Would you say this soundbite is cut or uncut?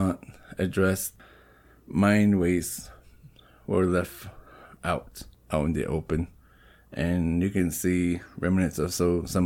uncut